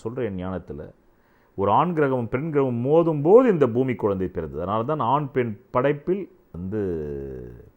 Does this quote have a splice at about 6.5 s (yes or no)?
yes